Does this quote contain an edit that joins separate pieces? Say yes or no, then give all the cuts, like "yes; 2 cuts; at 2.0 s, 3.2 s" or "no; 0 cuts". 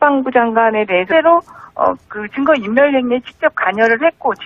no; 0 cuts